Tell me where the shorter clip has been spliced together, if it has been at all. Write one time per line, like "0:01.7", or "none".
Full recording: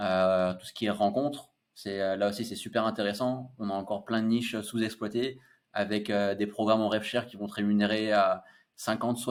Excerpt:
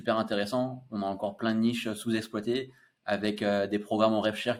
none